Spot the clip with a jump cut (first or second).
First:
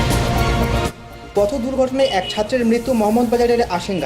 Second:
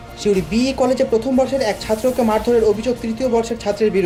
first